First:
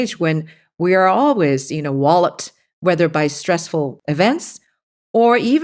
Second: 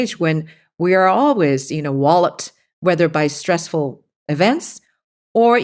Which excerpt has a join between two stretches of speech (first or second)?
first